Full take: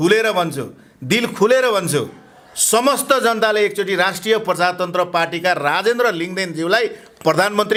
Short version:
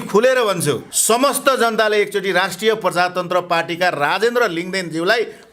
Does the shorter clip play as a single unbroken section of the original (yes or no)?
no